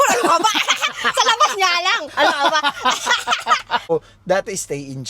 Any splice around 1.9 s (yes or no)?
no